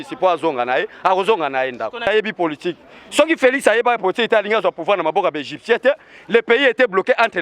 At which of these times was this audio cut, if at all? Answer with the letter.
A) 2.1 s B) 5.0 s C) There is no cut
A